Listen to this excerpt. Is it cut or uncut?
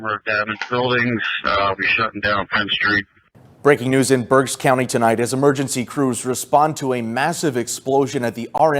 uncut